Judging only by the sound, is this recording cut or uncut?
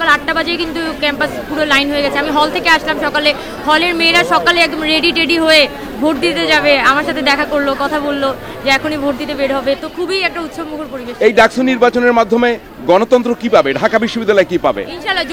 uncut